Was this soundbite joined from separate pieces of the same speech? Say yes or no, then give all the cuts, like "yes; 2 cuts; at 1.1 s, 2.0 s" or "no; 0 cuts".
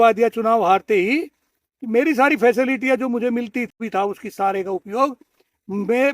yes; 1 cut; at 3.8 s